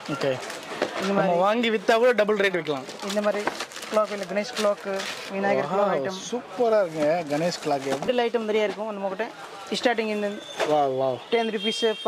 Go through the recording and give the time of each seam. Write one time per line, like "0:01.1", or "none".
0:08.1